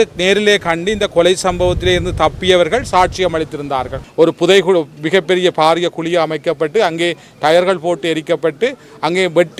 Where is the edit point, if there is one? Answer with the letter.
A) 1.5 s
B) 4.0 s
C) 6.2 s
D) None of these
B